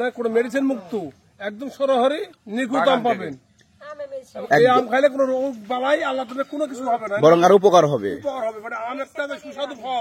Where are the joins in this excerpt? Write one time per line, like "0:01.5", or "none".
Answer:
none